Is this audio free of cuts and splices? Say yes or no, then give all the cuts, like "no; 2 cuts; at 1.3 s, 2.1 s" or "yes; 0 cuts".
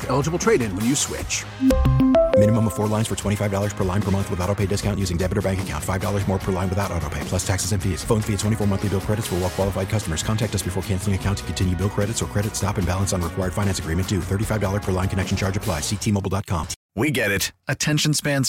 no; 1 cut; at 16.8 s